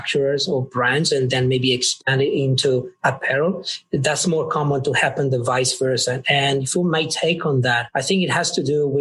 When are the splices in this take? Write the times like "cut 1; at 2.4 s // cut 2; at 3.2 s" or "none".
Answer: cut 1; at 7.8 s